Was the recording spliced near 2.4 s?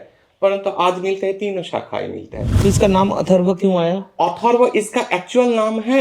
yes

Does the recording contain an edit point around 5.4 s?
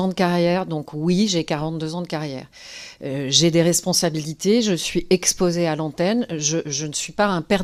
no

